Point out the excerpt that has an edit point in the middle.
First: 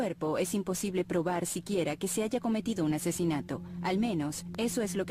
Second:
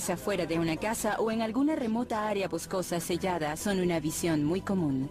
first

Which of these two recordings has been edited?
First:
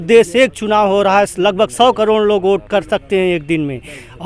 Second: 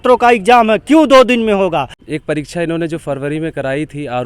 second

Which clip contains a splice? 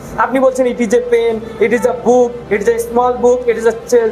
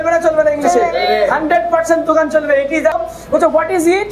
second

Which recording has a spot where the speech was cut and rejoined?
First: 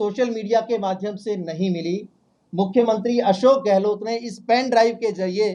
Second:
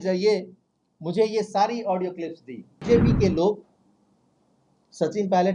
second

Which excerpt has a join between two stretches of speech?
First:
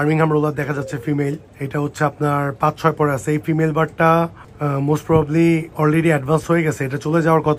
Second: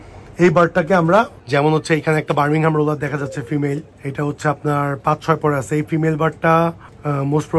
second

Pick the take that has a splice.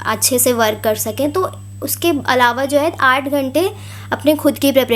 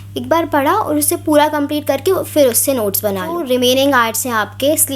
second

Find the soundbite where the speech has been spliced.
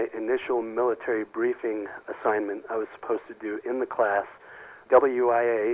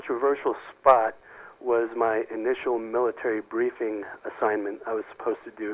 first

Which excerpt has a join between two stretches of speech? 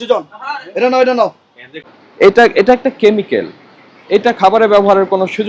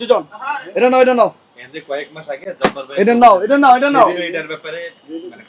first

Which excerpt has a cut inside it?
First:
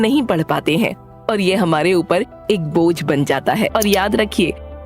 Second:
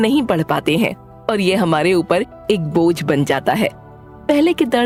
first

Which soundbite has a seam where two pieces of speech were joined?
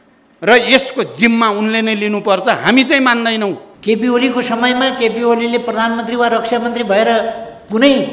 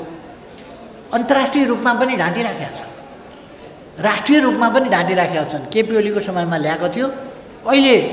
first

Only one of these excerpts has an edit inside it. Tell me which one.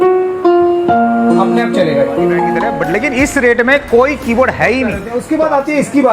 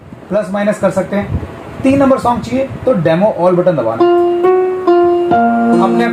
first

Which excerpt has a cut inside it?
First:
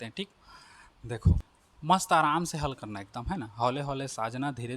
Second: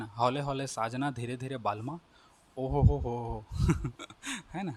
first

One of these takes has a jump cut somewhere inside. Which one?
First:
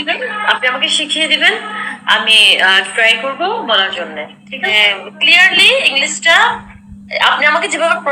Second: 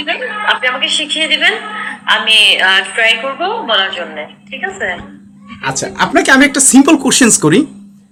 first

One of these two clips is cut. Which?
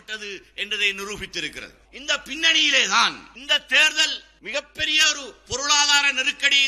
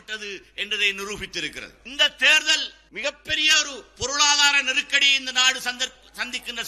second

